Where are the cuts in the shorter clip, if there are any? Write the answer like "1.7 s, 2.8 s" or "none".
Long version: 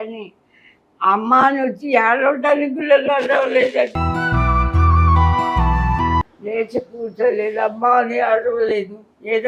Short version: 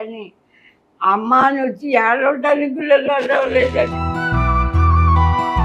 none